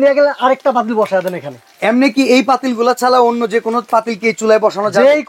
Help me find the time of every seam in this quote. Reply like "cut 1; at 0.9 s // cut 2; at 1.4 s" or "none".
cut 1; at 1.7 s